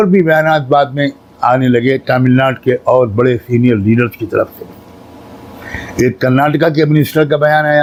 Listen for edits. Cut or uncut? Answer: uncut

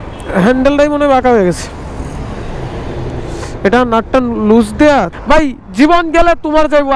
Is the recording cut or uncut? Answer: cut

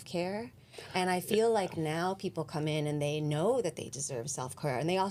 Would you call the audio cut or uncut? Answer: uncut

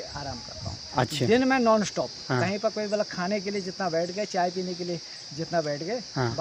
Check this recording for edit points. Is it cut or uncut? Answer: uncut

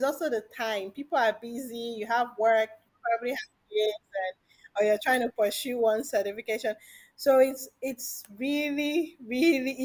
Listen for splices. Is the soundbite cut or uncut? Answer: uncut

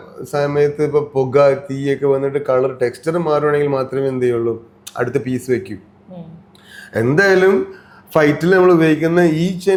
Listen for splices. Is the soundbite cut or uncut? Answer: uncut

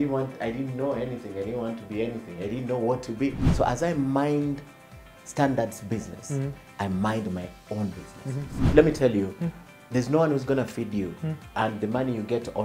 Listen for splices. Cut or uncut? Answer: cut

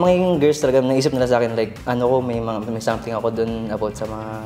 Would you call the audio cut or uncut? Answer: uncut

